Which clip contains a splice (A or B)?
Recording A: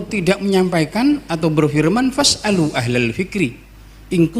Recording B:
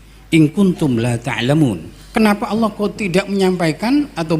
B